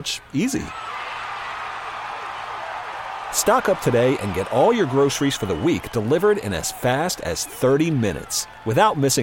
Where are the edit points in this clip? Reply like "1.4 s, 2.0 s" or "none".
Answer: none

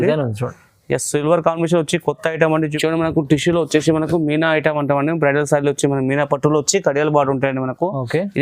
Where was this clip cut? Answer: 2.7 s

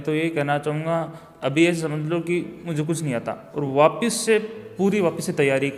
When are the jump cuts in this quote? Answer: none

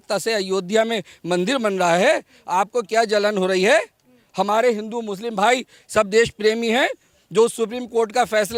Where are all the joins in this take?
none

